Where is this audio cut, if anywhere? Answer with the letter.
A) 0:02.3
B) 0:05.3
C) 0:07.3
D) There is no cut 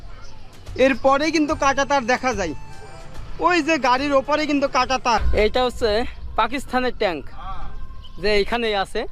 B